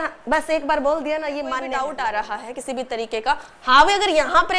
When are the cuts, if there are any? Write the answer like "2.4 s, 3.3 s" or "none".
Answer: 1.7 s